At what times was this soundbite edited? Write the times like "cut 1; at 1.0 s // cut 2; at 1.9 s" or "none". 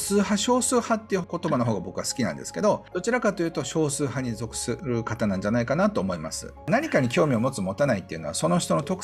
cut 1; at 1.2 s // cut 2; at 2.9 s // cut 3; at 4.8 s // cut 4; at 6.7 s

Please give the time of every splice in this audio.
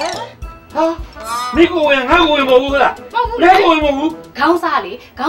cut 1; at 4.2 s

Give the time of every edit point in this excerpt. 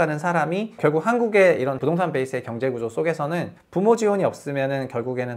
cut 1; at 0.8 s // cut 2; at 1.8 s // cut 3; at 3.6 s

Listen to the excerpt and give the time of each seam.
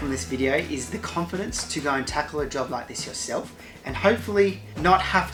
none

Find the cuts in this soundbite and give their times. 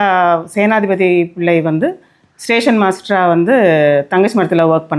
none

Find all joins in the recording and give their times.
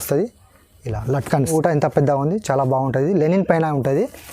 cut 1; at 1.5 s

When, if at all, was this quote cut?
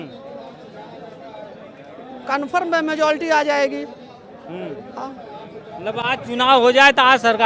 none

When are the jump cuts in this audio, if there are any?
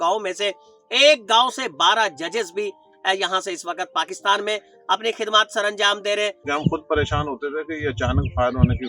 cut 1; at 6.4 s

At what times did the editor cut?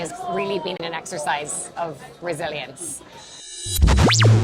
cut 1; at 0.8 s // cut 2; at 3.4 s

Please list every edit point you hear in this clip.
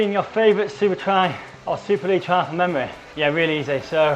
cut 1; at 1.5 s // cut 2; at 3.0 s

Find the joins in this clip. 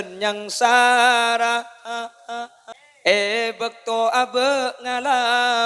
cut 1; at 2.6 s

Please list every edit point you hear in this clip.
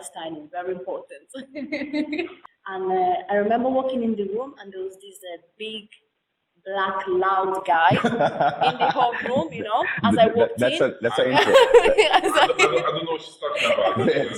cut 1; at 2.4 s

